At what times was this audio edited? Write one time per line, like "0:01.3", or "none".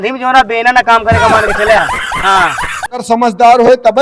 0:03.0

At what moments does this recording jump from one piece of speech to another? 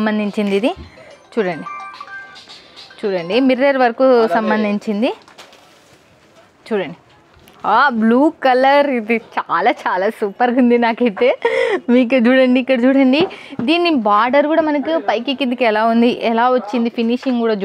none

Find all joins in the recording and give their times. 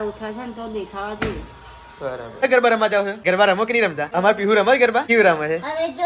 0:02.4
0:03.1
0:04.0
0:05.0

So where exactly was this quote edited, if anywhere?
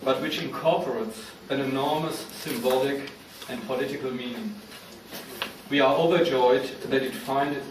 0:02.5

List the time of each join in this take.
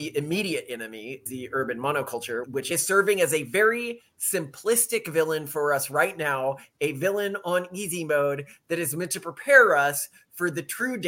0:01.3
0:02.6

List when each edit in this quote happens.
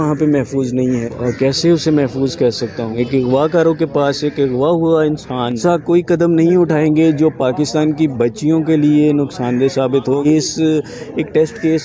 0:01.1
0:02.9
0:05.6
0:10.2

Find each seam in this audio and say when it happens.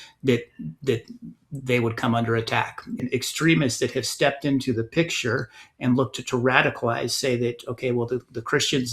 0:03.0

